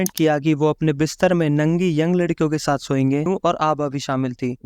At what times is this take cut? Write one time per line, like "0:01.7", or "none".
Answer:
0:03.3